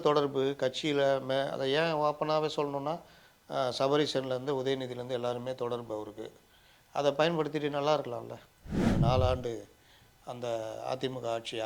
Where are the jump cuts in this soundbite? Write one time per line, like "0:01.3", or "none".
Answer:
0:08.9